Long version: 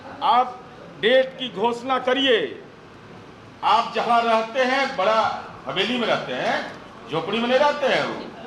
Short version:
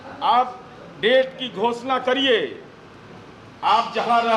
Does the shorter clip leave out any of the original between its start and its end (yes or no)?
no